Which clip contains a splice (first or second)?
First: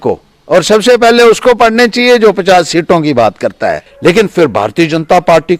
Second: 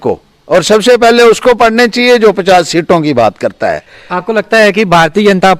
first